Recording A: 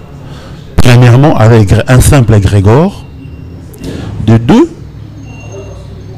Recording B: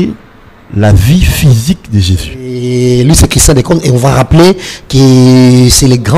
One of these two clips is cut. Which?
B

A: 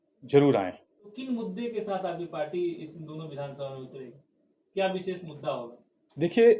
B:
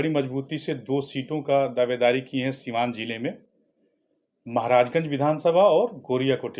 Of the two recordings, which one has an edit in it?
A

